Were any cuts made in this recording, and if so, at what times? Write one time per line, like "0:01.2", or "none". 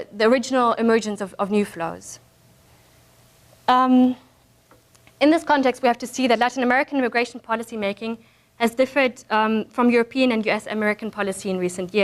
none